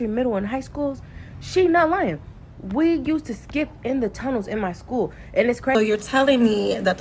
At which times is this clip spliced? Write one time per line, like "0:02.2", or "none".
0:05.8

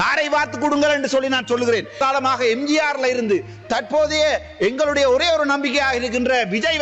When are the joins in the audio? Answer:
0:02.0

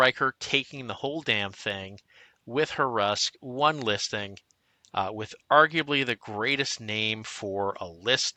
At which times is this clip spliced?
none

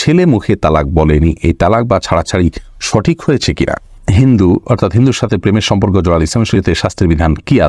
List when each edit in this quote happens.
0:04.0
0:06.5

